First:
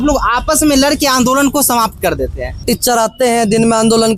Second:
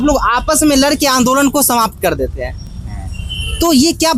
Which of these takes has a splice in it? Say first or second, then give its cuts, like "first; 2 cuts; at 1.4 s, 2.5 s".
first; 1 cut; at 2.6 s